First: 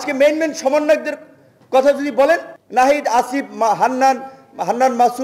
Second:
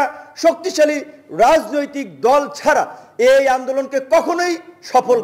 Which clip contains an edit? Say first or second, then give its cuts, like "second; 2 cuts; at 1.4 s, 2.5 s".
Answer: first; 1 cut; at 2.6 s